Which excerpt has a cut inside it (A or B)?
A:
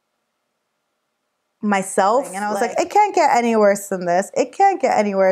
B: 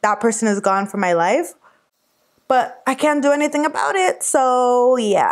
A